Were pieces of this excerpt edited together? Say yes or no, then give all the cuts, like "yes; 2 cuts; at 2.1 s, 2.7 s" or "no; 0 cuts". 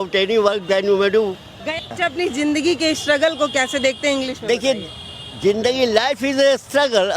yes; 1 cut; at 1.9 s